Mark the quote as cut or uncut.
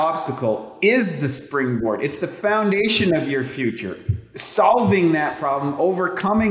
uncut